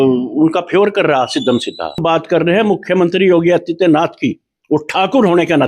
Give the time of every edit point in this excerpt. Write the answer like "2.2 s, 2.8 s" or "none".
2.0 s